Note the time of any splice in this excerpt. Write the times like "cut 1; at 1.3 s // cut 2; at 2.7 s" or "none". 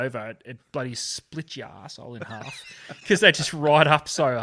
none